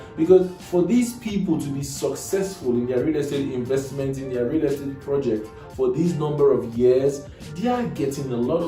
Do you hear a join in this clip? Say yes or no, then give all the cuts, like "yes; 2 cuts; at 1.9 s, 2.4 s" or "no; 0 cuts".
yes; 1 cut; at 7.3 s